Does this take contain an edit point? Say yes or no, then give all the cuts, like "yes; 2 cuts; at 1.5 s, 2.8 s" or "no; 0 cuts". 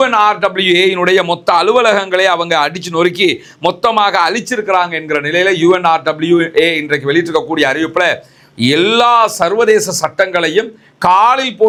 no; 0 cuts